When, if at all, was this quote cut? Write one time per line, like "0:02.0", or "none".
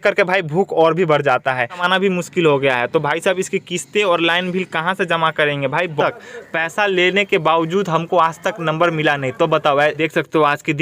0:01.8
0:06.0
0:10.0